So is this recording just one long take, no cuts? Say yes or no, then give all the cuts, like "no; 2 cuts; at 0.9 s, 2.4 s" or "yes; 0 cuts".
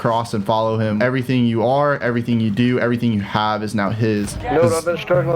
no; 2 cuts; at 1.0 s, 4.3 s